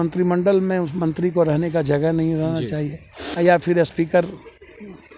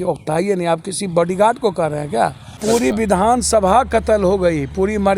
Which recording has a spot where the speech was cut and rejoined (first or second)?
second